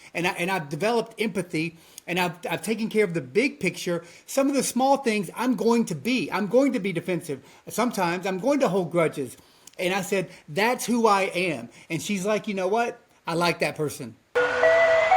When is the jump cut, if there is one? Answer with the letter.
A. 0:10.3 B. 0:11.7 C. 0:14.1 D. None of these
C